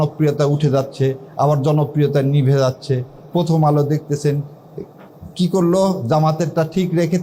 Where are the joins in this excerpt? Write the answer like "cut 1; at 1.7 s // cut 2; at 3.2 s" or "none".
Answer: none